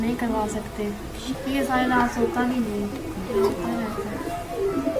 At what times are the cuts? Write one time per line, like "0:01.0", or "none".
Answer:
0:01.4